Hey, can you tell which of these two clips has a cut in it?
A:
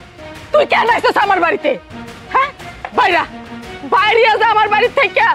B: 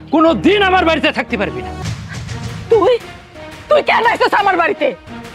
B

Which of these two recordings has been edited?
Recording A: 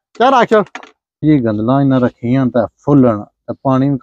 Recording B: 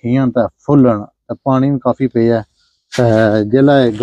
A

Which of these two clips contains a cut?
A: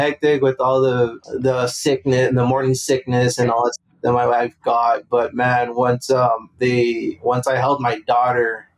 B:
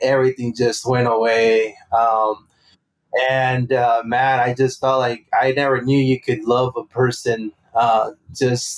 A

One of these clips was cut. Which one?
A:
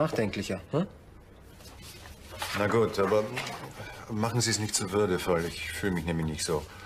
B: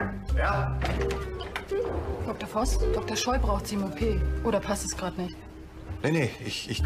B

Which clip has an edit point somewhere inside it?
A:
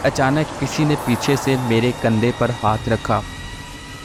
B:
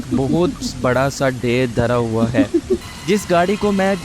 B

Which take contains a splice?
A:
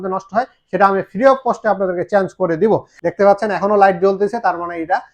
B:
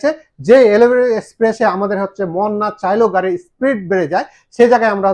A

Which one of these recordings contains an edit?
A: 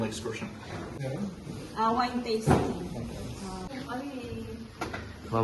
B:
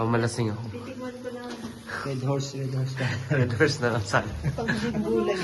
A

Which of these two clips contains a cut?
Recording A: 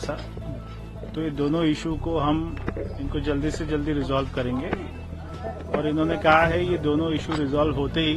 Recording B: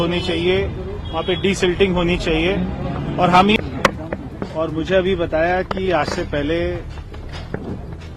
B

